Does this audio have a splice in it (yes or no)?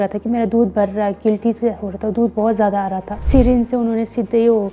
yes